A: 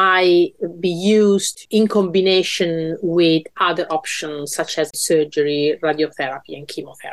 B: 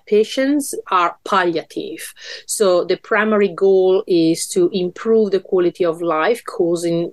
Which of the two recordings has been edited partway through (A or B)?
A